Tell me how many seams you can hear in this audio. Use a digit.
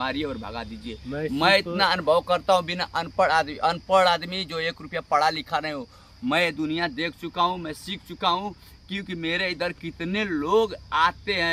0